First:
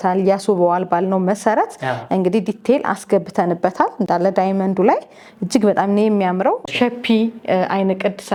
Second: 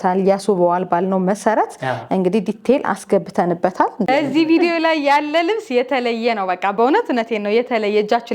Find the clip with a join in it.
second; 1 cut; at 4.1 s

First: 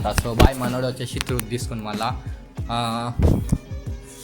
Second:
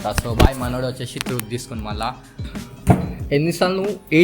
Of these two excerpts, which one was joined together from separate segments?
second; 1 cut; at 2.6 s

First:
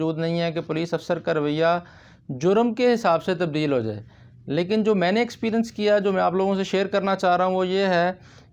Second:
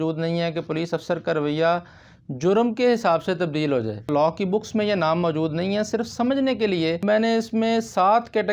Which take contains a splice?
second; 2 cuts; at 4.1 s, 7.0 s

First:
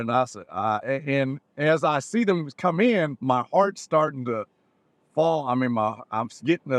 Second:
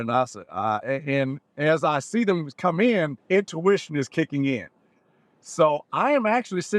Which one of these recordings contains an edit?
second; 1 cut; at 3.2 s

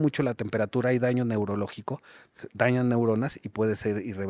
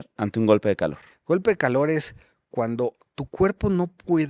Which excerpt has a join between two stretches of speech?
second; 1 cut; at 1.1 s

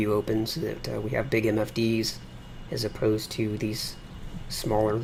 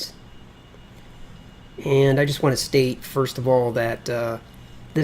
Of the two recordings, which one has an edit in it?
second; 1 cut; at 3.2 s

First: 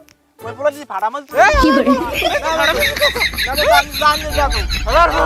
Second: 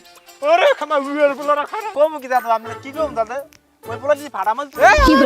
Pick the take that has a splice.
second; 1 cut; at 1.9 s

